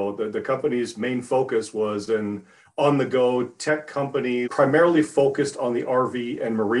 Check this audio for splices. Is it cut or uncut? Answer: cut